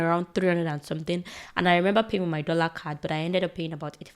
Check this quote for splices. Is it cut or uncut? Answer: uncut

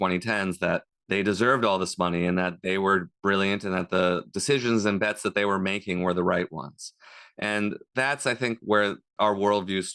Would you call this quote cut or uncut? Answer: uncut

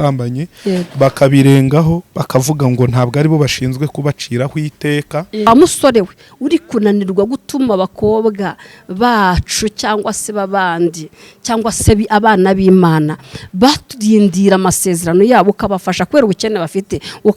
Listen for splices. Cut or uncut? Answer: cut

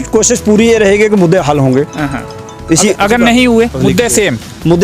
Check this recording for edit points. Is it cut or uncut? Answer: cut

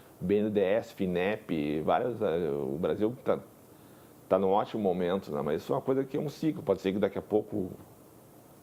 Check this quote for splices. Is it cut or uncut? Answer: uncut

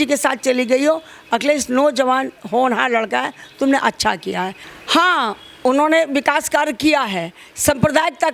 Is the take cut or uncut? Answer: cut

